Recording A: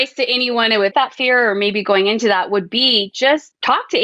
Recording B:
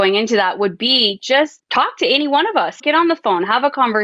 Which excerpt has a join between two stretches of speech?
A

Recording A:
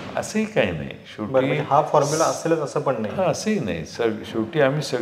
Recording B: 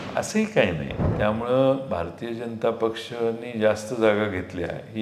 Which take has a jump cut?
B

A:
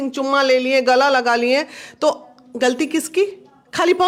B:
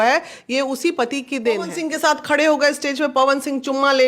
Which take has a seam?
B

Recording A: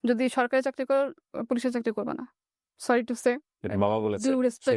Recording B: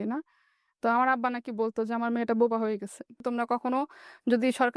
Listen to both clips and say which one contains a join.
B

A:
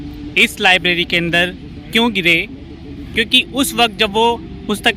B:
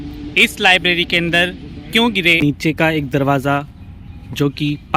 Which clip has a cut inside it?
B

